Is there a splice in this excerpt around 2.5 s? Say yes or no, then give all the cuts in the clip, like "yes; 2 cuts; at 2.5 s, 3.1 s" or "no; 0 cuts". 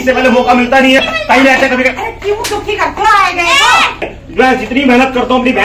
no; 2 cuts; at 1.0 s, 4.2 s